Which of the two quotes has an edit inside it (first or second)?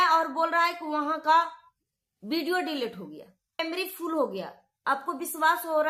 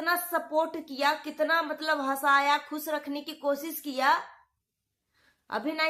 first